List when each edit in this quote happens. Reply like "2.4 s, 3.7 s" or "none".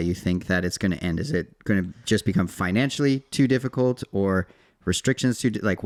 none